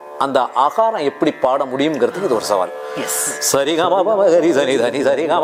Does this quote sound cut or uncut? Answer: uncut